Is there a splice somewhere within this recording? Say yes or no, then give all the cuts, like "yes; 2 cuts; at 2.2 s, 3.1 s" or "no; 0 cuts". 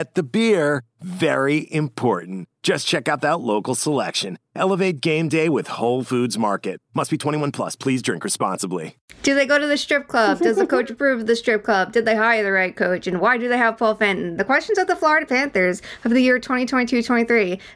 yes; 1 cut; at 9.2 s